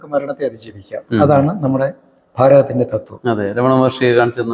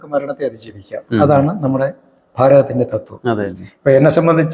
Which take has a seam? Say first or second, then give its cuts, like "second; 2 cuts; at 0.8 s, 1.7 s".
second; 1 cut; at 3.5 s